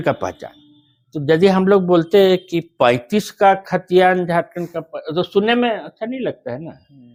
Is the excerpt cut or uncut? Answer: uncut